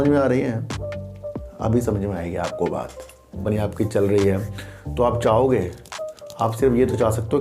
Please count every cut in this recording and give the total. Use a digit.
1